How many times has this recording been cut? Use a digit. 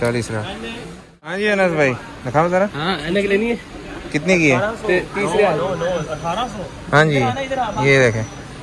1